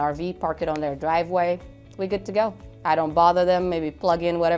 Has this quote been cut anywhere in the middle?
no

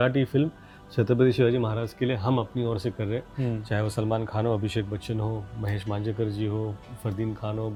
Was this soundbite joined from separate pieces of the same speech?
no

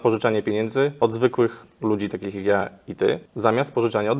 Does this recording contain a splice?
yes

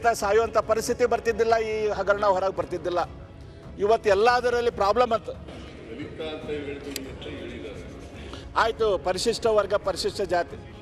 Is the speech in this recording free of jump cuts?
yes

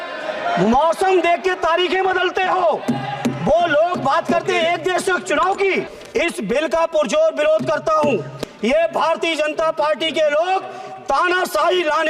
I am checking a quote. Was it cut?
yes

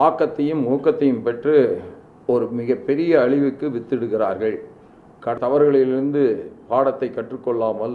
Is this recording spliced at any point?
yes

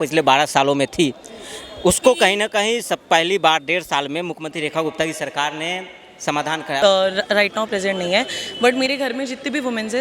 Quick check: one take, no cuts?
no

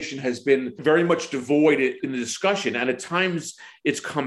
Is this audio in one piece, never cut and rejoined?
no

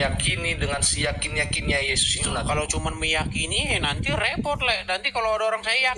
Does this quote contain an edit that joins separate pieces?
no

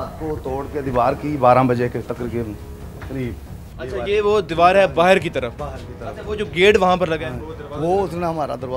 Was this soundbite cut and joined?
no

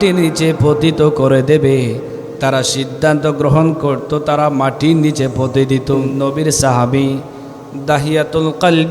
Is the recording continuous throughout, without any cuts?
no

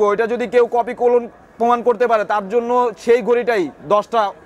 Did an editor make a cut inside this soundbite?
no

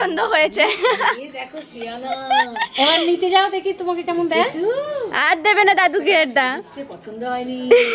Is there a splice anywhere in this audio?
no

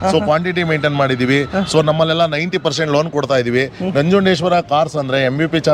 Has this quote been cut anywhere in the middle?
no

